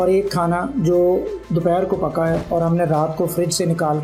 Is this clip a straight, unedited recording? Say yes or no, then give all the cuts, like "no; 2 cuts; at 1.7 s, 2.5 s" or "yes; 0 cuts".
yes; 0 cuts